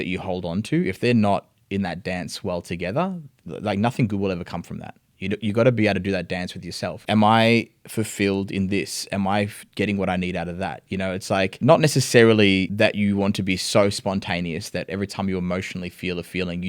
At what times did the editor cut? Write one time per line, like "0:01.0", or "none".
0:03.4
0:07.0
0:11.5
0:12.7